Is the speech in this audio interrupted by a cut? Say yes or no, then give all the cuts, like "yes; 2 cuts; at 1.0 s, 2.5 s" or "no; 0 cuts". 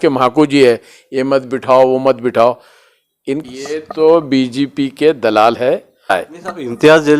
yes; 2 cuts; at 3.4 s, 6.1 s